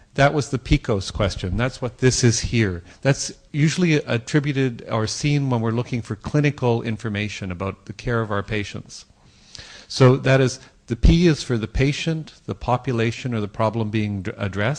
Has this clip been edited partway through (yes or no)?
yes